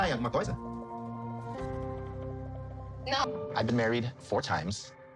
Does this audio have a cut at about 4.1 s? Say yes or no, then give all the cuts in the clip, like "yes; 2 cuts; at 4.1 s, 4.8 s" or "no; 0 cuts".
no; 1 cut; at 1.7 s